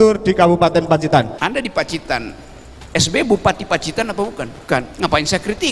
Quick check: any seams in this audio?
yes; 2 cuts; at 1.4 s, 4.8 s

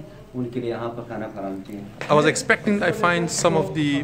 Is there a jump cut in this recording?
yes; 1 cut; at 1.8 s

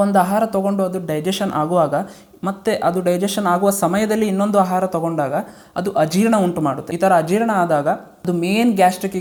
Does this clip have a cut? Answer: no; 0 cuts

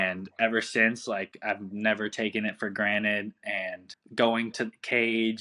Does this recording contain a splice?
yes; 1 cut; at 3.9 s

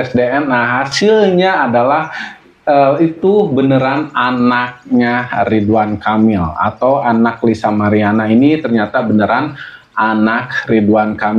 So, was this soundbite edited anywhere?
no; 0 cuts

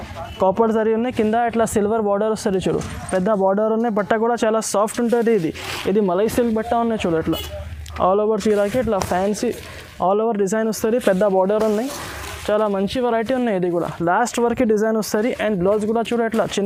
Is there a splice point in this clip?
no; 0 cuts

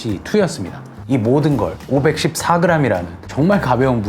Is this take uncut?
no; 2 cuts; at 0.9 s, 3.2 s

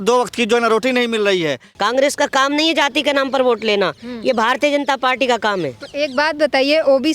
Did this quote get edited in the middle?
yes; 1 cut; at 1.7 s

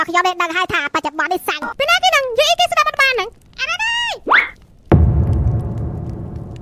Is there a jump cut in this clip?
yes; 1 cut; at 1.6 s

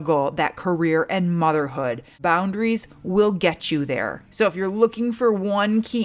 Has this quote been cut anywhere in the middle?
yes; 2 cuts; at 2.1 s, 4.2 s

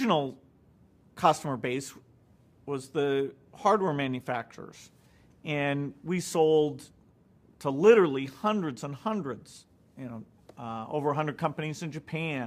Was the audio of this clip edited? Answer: yes; 1 cut; at 6.3 s

